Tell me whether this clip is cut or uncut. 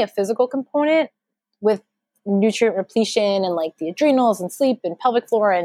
uncut